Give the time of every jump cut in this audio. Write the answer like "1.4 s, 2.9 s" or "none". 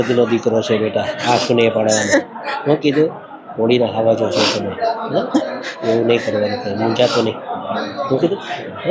none